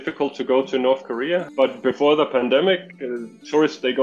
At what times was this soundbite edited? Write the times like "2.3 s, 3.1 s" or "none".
1.5 s